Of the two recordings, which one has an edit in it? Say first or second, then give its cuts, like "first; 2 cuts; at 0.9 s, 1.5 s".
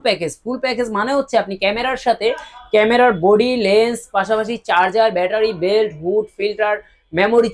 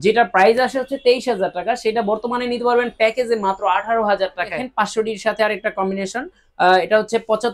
second; 1 cut; at 4.6 s